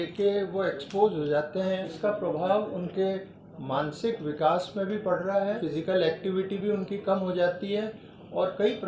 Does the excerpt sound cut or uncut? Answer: cut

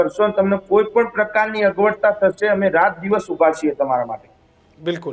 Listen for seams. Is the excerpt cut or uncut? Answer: uncut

